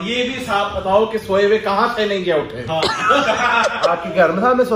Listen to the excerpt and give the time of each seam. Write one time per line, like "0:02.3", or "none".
0:02.8